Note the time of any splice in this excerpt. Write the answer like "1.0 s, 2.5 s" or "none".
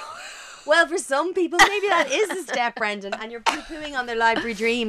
none

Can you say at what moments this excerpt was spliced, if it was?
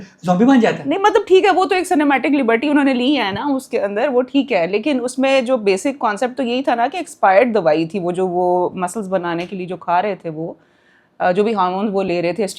none

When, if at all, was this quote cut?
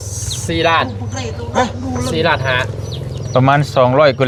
none

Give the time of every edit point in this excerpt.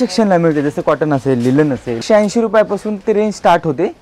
2.0 s

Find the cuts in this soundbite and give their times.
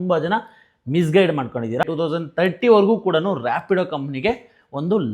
1.9 s

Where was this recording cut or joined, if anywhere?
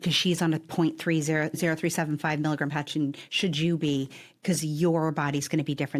1.6 s, 5.1 s

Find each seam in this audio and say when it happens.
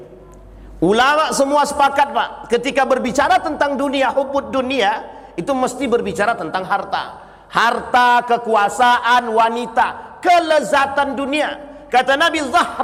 none

